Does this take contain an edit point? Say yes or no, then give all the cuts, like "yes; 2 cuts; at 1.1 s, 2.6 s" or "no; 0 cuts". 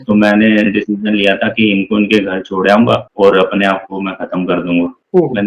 no; 0 cuts